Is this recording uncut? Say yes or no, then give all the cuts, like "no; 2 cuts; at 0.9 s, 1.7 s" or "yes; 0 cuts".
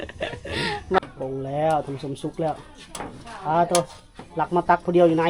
no; 1 cut; at 1.0 s